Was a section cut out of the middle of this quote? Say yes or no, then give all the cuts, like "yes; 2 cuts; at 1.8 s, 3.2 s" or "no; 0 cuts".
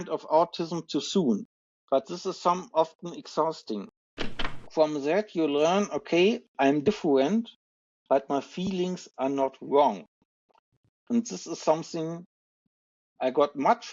yes; 1 cut; at 4.3 s